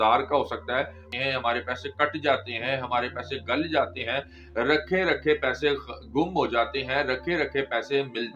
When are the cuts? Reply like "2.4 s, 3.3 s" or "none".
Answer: 1.1 s